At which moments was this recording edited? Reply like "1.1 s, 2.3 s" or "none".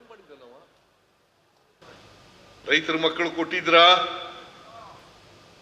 1.8 s